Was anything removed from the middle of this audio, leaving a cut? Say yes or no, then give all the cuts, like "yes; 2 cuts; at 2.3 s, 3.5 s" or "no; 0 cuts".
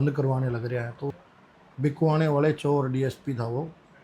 yes; 1 cut; at 1.3 s